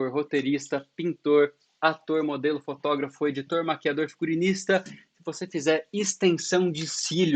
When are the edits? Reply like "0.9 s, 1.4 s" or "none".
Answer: none